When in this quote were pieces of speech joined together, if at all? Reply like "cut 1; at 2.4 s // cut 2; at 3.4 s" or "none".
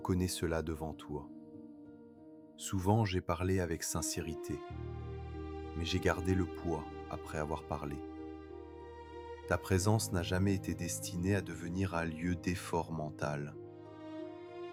none